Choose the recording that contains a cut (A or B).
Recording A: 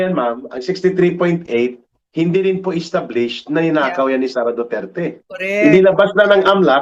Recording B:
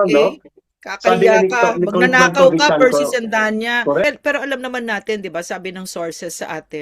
B